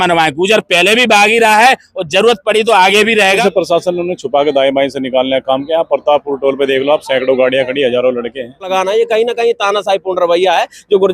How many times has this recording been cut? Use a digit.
2